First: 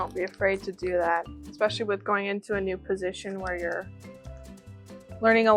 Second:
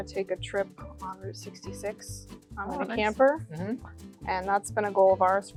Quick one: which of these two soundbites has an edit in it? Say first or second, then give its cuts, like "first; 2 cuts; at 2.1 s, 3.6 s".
first; 1 cut; at 1.4 s